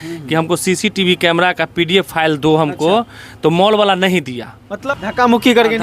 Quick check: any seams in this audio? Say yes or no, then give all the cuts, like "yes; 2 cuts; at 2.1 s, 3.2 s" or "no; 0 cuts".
yes; 1 cut; at 4.7 s